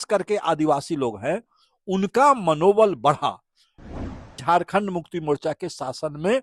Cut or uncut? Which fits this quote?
cut